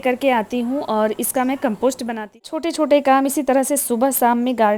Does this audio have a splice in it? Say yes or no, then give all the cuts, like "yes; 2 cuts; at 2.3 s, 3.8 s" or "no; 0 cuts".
yes; 1 cut; at 2.5 s